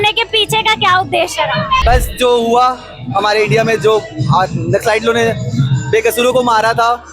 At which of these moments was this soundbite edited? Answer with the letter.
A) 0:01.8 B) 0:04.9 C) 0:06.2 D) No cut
A